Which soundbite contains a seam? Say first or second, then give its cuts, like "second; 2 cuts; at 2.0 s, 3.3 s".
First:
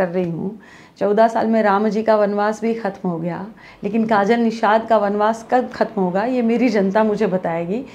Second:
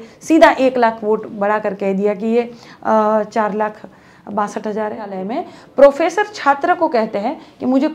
second; 1 cut; at 5.2 s